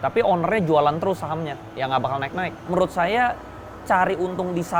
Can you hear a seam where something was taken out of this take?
yes; 1 cut; at 2.6 s

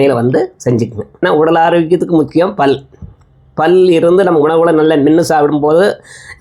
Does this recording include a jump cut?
yes; 1 cut; at 1.2 s

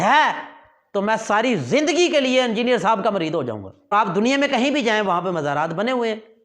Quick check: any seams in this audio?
yes; 1 cut; at 3.9 s

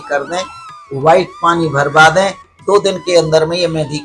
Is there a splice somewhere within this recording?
no; 0 cuts

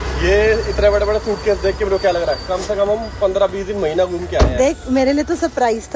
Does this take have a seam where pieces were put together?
no; 0 cuts

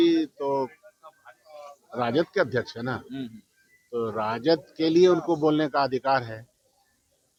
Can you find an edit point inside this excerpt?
no; 0 cuts

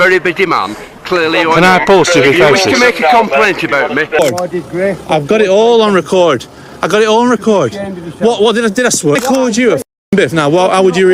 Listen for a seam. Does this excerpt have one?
yes; 2 cuts; at 4.2 s, 9.2 s

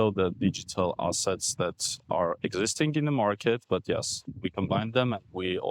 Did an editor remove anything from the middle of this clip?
no; 0 cuts

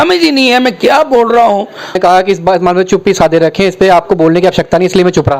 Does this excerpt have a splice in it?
yes; 1 cut; at 2.0 s

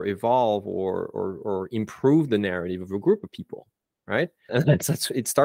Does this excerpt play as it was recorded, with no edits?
no; 1 cut; at 4.5 s

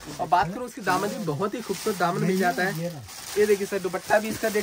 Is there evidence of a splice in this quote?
no; 0 cuts

